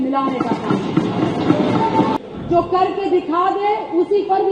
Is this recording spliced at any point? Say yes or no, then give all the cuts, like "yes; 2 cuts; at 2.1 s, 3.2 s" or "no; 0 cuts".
yes; 1 cut; at 2.1 s